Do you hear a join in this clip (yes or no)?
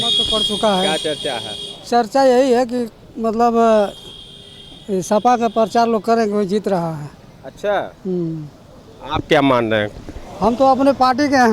no